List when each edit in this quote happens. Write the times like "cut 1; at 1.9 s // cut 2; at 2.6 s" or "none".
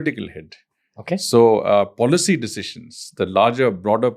none

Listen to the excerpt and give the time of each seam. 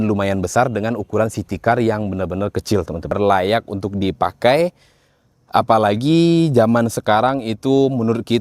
cut 1; at 3.1 s

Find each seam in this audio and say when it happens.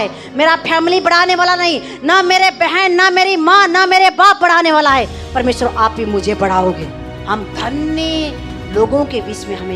cut 1; at 7.1 s

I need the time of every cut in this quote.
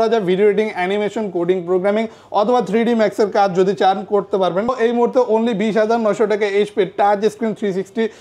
cut 1; at 4.7 s

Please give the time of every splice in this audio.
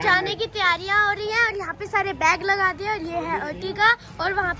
none

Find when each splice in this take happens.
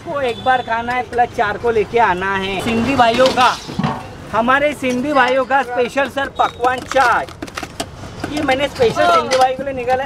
none

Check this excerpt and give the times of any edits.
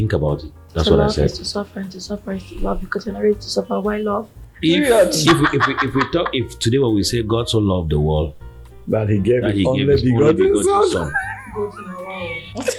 none

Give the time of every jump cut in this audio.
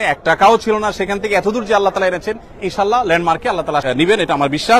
cut 1; at 3.8 s

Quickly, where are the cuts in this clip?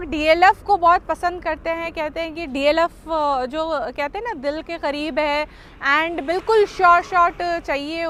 none

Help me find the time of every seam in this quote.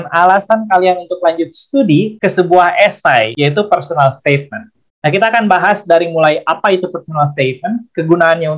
cut 1; at 2.1 s // cut 2; at 3.3 s

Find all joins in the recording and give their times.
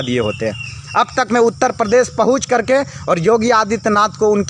none

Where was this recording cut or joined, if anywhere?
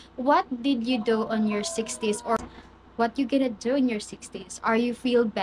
cut 1; at 2.4 s

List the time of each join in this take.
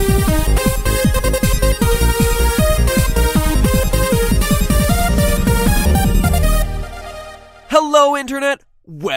cut 1; at 3.6 s

